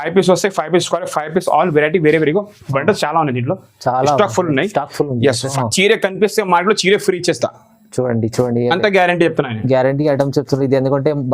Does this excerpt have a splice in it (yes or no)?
yes